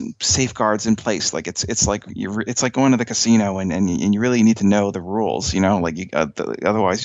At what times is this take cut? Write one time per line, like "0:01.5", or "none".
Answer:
none